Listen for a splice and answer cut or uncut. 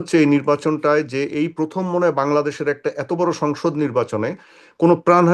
uncut